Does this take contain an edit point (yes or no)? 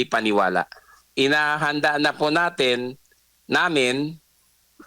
yes